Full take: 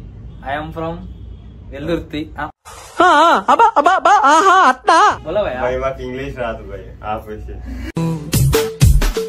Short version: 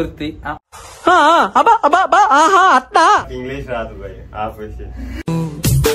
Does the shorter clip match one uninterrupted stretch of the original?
no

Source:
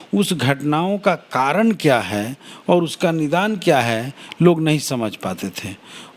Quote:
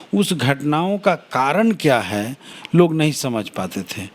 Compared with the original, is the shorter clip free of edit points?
no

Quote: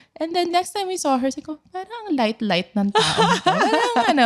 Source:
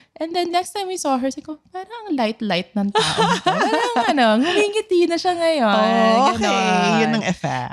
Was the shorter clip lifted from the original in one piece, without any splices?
yes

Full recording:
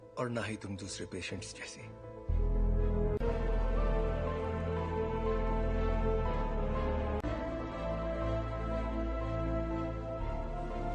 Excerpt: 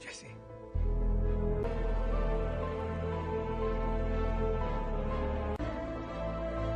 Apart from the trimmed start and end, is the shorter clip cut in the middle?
yes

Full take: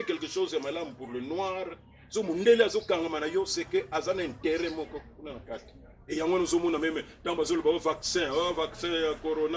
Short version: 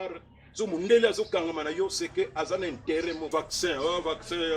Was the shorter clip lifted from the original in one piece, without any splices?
no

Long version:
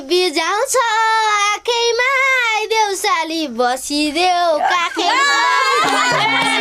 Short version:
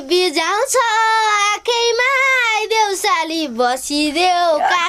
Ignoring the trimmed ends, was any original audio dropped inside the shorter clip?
no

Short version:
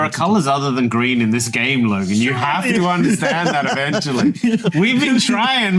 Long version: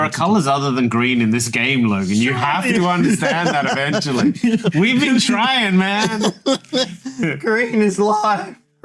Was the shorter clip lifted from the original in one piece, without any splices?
yes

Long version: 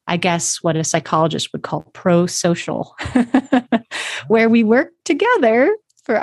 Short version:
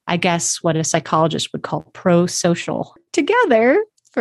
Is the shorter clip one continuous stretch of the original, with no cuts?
no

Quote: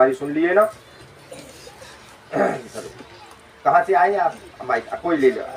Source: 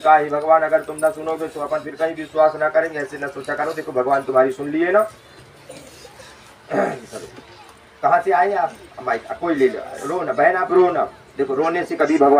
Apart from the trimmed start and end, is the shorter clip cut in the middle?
no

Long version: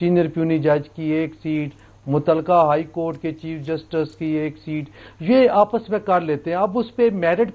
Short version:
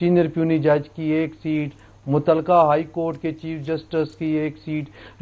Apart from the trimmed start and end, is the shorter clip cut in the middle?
no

